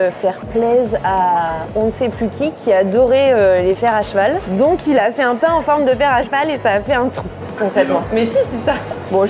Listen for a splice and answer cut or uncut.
uncut